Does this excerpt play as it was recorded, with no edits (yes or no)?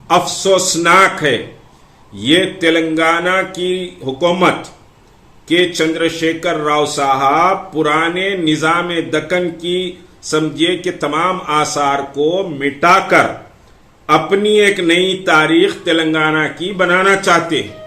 yes